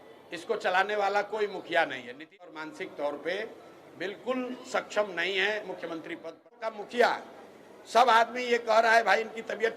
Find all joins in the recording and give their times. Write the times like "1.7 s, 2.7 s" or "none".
2.6 s, 6.7 s